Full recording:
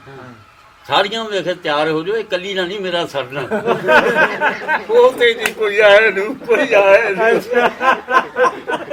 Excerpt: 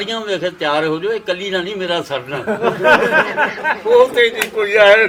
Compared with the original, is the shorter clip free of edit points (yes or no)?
yes